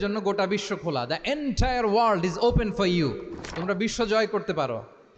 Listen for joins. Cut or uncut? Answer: uncut